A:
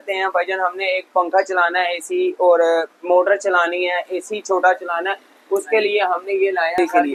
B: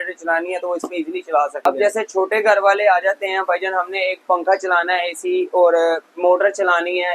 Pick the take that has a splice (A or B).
B